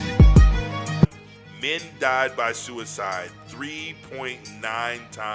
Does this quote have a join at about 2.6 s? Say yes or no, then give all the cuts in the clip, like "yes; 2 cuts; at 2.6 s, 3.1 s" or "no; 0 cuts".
no; 1 cut; at 1.0 s